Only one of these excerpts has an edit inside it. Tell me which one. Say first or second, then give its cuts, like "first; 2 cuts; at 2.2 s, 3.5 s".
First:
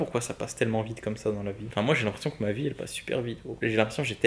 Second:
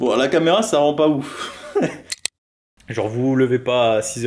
second; 1 cut; at 2.4 s